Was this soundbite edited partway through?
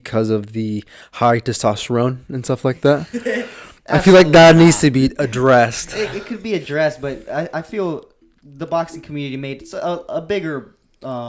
no; 0 cuts

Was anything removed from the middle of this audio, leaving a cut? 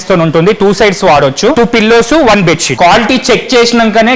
yes; 2 cuts; at 1.5 s, 2.7 s

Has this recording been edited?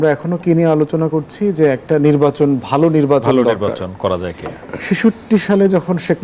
no; 0 cuts

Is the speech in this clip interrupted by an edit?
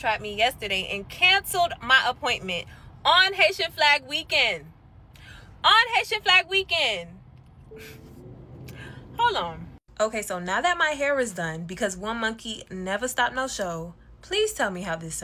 no; 0 cuts

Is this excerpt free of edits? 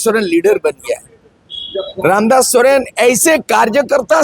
yes; 0 cuts

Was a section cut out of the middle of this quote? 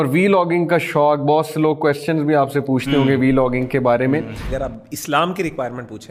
yes; 1 cut; at 4.4 s

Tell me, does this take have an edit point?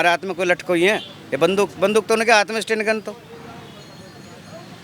no; 0 cuts

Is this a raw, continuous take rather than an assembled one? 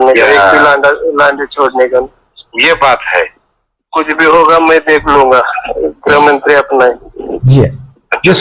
yes; 0 cuts

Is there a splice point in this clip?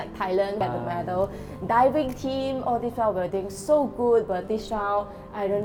no; 0 cuts

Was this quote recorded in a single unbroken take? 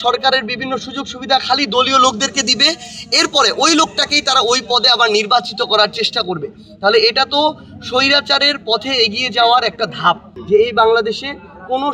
no; 1 cut; at 10.3 s

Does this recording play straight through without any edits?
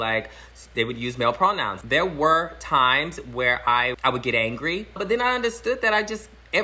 no; 3 cuts; at 1.8 s, 4.0 s, 5.0 s

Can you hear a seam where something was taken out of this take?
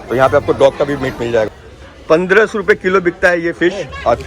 yes; 1 cut; at 1.6 s

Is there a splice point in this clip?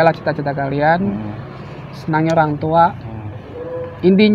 no; 0 cuts

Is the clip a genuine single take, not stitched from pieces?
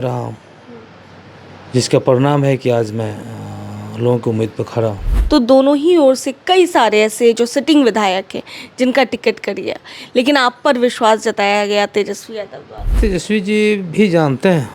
no; 2 cuts; at 5.1 s, 13.0 s

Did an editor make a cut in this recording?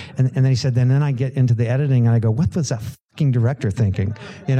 no; 0 cuts

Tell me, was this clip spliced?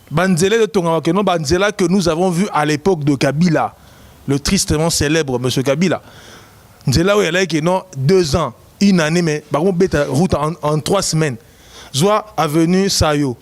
no; 0 cuts

